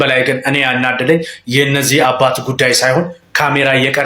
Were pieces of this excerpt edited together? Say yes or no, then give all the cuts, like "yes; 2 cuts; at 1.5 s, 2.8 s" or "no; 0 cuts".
no; 0 cuts